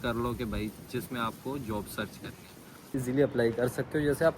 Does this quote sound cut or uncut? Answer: cut